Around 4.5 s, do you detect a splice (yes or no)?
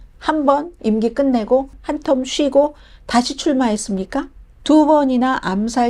yes